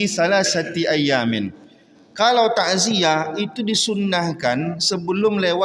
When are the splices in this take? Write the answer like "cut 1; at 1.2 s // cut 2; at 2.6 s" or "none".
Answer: none